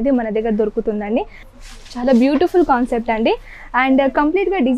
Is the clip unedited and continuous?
no; 1 cut; at 1.4 s

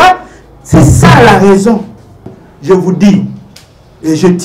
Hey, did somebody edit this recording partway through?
yes; 1 cut; at 2.4 s

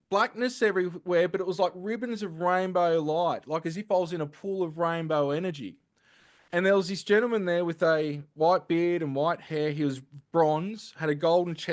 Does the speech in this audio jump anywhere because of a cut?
no; 0 cuts

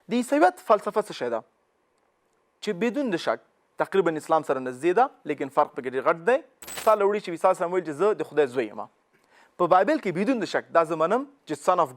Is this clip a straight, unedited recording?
no; 1 cut; at 6.7 s

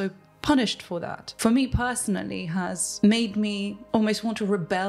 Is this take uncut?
no; 3 cuts; at 1.2 s, 2.8 s, 3.8 s

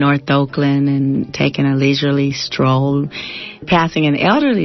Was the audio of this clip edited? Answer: yes; 2 cuts; at 1.3 s, 3.6 s

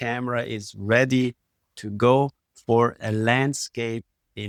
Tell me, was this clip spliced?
no; 0 cuts

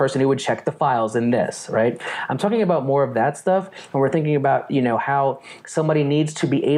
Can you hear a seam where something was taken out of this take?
no; 0 cuts

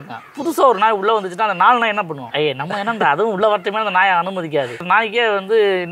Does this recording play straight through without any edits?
no; 2 cuts; at 2.3 s, 4.8 s

